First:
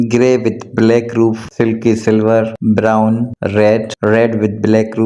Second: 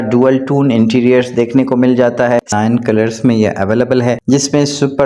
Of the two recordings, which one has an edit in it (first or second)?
second